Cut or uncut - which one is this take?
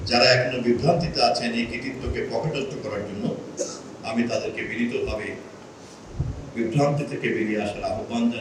uncut